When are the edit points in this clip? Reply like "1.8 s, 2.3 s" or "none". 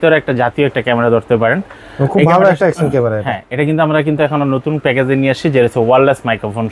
none